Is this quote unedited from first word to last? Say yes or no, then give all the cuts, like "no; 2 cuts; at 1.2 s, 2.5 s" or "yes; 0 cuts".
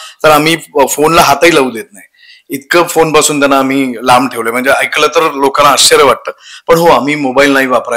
yes; 0 cuts